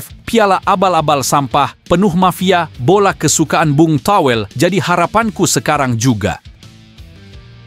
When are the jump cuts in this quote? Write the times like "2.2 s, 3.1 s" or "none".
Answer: 6.5 s